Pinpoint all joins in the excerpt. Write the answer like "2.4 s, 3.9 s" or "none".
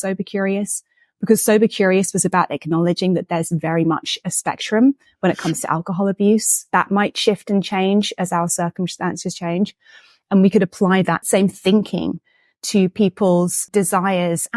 11.2 s, 13.6 s